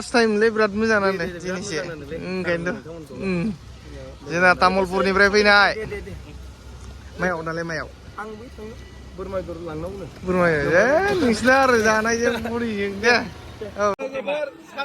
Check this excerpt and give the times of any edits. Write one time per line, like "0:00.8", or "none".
0:14.0